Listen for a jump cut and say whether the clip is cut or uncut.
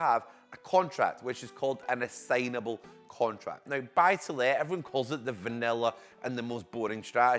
cut